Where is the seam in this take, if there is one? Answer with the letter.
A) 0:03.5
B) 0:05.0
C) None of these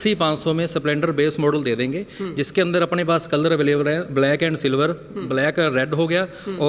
C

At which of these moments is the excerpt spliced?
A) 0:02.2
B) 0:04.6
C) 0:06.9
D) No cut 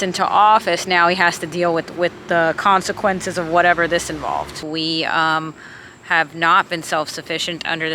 B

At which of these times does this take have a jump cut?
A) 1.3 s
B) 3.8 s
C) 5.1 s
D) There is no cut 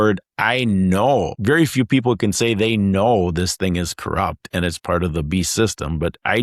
A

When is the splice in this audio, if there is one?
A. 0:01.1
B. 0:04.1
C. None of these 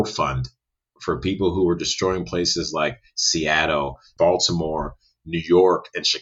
B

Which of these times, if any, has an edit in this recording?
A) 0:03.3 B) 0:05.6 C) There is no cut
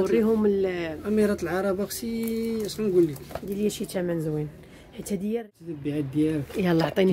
B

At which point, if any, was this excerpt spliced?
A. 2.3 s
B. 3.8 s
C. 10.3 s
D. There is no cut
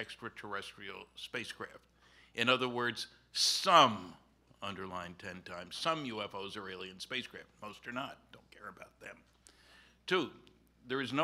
A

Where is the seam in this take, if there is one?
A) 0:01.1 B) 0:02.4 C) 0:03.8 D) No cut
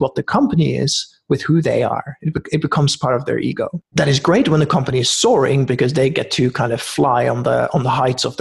C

